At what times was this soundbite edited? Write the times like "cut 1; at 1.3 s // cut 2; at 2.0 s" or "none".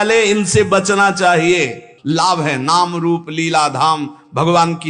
cut 1; at 1.9 s